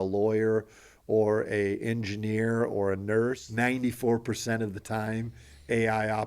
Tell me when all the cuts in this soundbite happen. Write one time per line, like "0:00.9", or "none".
0:03.4